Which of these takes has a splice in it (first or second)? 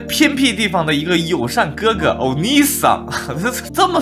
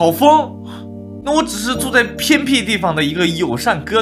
second